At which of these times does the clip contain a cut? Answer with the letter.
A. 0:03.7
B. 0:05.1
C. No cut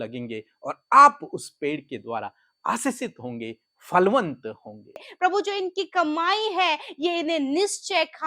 B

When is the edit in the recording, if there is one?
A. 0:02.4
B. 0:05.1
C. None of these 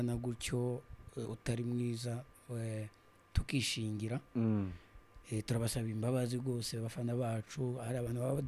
C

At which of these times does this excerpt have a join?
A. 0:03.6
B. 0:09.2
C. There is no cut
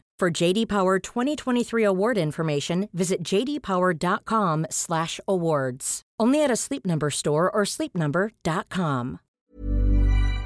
B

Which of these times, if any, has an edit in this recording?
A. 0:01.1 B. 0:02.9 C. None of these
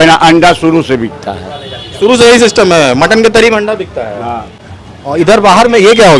C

